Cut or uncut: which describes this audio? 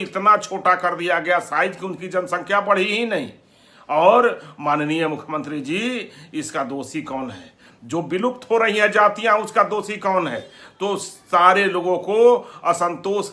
uncut